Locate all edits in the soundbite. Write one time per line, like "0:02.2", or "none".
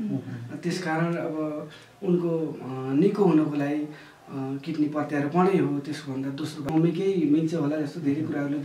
0:06.7